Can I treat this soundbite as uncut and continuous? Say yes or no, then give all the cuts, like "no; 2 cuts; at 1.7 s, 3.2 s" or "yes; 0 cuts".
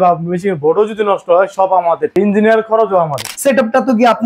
no; 2 cuts; at 2.1 s, 3.3 s